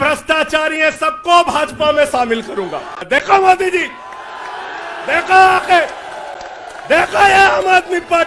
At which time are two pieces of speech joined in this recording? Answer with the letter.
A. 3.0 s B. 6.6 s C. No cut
A